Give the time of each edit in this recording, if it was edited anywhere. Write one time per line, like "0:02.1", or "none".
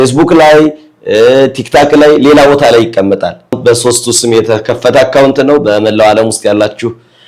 0:03.6